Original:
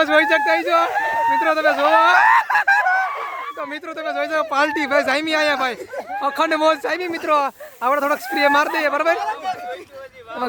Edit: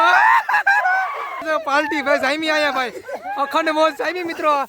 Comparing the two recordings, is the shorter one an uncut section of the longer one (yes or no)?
no